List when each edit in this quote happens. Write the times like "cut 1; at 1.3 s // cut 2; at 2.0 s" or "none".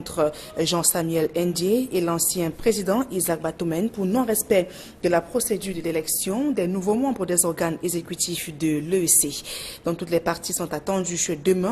cut 1; at 4.8 s